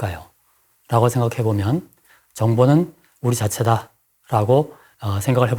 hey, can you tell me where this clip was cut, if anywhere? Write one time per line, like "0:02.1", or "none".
0:02.0

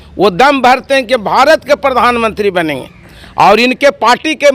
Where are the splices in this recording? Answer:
none

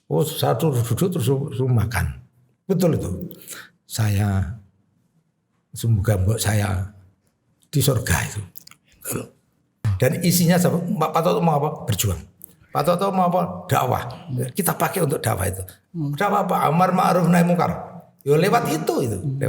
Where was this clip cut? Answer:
0:09.8

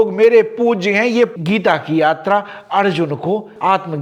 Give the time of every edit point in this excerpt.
0:01.3

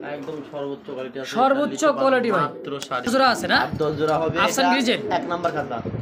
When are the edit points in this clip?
0:03.1

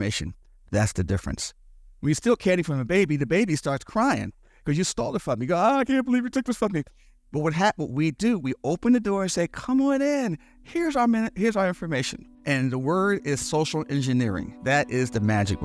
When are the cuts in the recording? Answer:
0:14.5

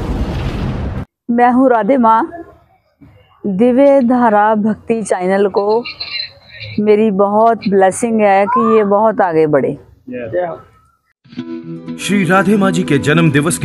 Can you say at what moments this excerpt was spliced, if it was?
0:01.0
0:11.1

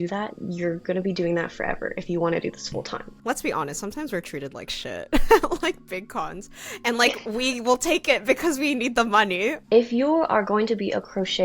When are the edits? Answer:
0:03.1
0:09.6

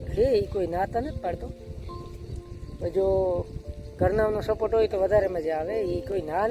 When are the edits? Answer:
none

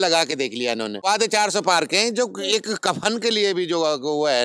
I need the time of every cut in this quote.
0:01.0

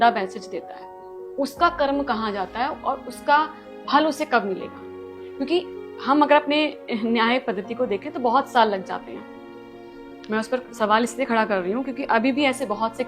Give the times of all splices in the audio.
none

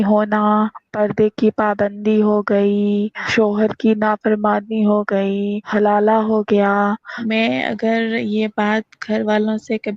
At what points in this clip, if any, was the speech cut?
0:00.9
0:03.3
0:05.7
0:07.1

